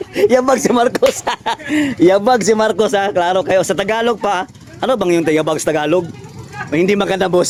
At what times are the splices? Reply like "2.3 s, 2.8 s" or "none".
none